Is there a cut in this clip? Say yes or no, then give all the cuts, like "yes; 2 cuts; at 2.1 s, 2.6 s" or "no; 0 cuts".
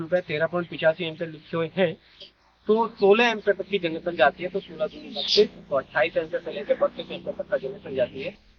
no; 0 cuts